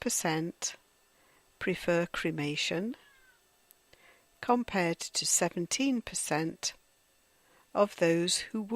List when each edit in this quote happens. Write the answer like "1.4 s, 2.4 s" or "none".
6.1 s